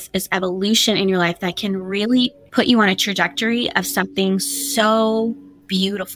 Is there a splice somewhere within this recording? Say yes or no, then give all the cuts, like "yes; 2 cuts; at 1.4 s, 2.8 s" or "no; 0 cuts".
no; 0 cuts